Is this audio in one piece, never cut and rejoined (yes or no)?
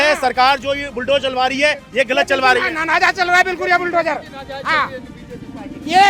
yes